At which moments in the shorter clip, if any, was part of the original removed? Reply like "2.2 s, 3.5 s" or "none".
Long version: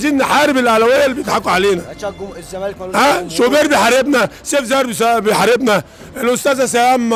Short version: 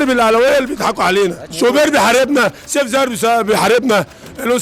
1.5 s